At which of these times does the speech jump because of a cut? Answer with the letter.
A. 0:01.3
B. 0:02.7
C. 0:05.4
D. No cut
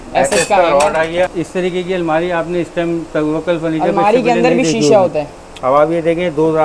A